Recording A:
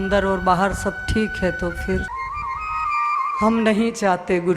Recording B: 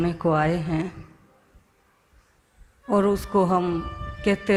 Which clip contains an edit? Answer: A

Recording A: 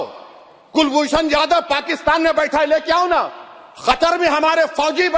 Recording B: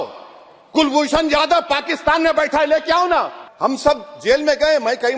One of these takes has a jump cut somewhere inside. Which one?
B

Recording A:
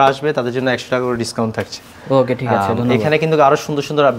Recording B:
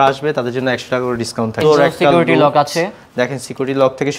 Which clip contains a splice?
B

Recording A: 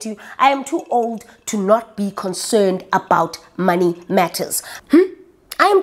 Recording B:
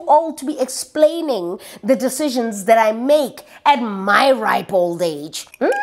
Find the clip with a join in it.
A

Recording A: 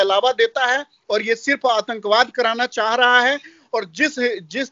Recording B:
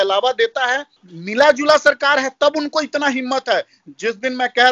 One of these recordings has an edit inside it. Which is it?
B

